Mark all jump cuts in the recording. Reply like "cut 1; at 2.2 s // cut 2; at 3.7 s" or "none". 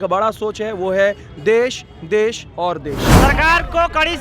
cut 1; at 3.1 s